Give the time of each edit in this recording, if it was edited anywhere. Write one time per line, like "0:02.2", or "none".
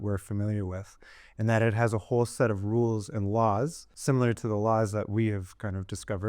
0:03.9